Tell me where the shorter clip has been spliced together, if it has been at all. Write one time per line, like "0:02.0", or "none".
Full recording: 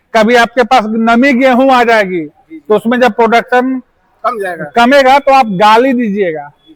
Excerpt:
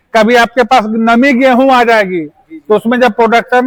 none

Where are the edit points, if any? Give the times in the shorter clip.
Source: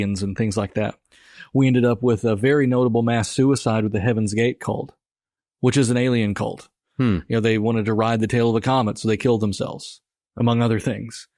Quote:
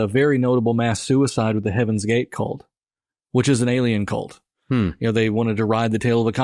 none

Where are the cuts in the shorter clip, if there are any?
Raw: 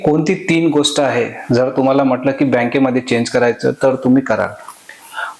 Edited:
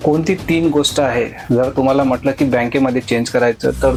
none

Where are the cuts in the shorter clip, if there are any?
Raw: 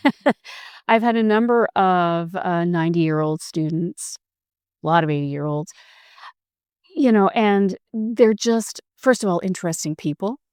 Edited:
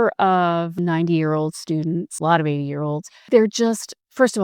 0:00.8
0:02.1
0:03.3

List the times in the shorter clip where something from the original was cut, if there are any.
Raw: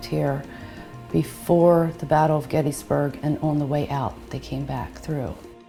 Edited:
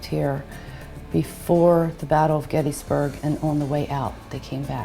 none

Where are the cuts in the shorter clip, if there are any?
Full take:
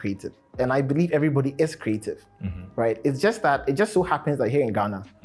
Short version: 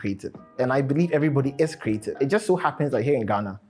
0:02.2

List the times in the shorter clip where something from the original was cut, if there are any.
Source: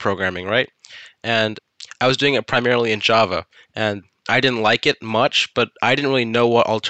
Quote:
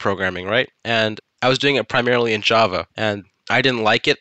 0:01.1
0:02.9

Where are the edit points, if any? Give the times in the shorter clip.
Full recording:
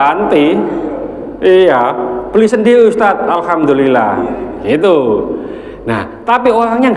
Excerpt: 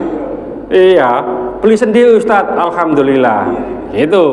none

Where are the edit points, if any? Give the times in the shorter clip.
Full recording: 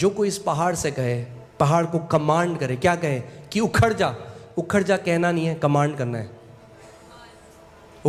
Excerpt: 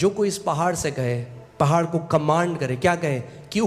none

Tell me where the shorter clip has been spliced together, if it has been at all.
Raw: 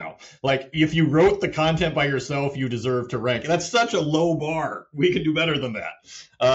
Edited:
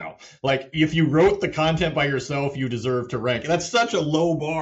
none

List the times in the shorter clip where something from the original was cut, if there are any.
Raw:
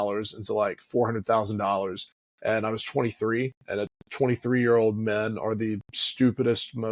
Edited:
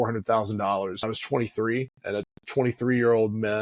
0:01.0

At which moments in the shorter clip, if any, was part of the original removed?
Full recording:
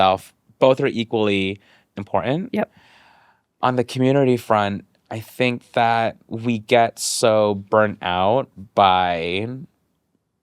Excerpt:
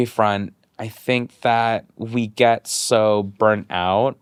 none

